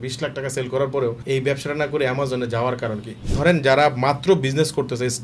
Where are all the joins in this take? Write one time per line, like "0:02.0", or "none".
0:01.2
0:03.1

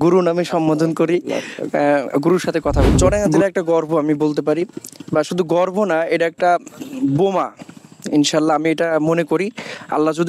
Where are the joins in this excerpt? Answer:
0:03.0

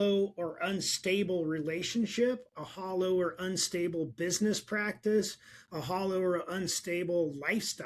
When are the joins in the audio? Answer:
none

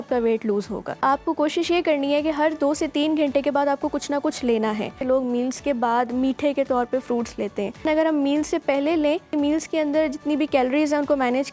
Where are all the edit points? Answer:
0:01.0
0:05.0
0:07.8
0:09.3

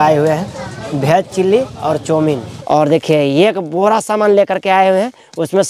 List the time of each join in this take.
0:02.5

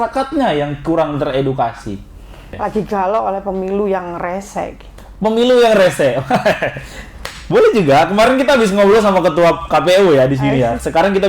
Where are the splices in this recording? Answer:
0:02.6

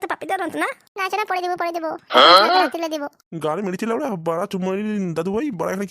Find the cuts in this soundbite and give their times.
0:02.0
0:02.7

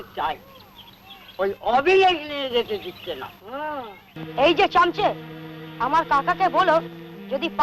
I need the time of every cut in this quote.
0:04.2

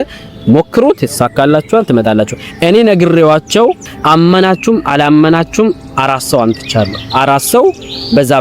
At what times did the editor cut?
0:03.9

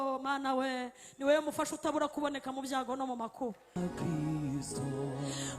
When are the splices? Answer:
0:03.8

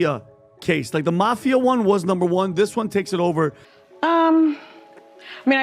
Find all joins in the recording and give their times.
0:03.7

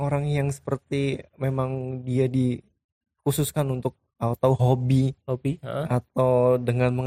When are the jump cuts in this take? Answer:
none

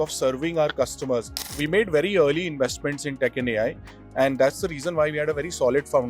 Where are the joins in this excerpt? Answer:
0:01.6

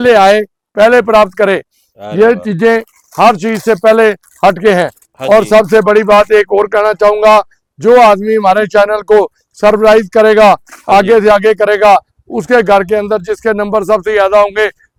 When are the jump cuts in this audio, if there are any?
none

